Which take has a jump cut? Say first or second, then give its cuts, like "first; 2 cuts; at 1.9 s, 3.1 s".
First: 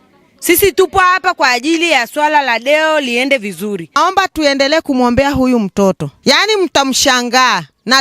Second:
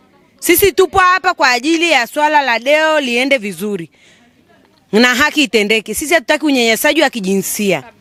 first; 2 cuts; at 3.9 s, 6.1 s